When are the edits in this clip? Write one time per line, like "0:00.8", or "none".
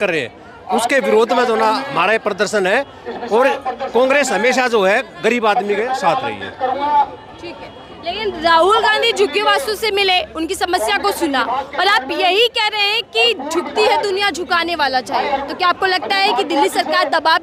none